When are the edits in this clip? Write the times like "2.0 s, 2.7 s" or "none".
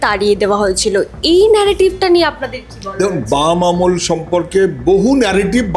none

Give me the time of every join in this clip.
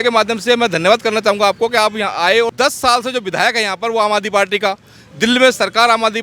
2.5 s

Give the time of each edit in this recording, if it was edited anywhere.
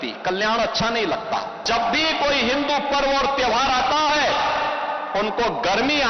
1.7 s

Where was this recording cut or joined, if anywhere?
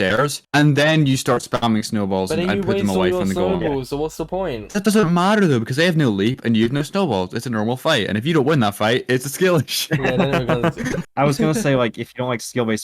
11.0 s

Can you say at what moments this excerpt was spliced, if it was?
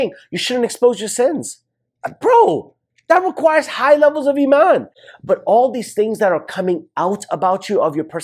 5.0 s

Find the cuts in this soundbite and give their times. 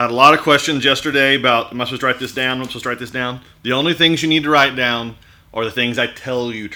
none

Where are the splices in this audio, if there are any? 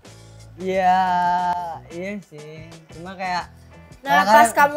none

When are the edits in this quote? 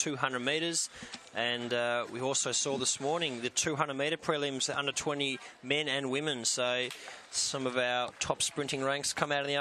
6.2 s

